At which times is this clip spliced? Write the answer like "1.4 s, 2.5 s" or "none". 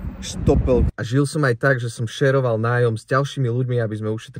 0.9 s